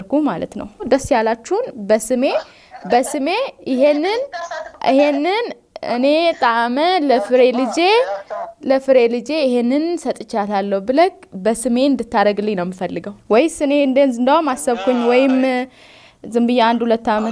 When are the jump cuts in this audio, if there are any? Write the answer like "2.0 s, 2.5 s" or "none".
0.9 s, 13.1 s